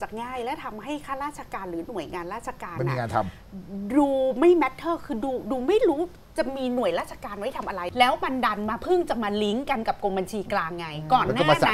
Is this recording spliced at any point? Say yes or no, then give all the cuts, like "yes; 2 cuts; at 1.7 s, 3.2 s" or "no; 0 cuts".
yes; 1 cut; at 7.8 s